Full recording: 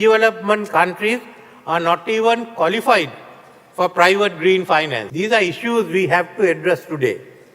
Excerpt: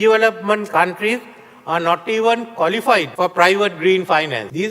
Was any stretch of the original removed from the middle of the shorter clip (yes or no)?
yes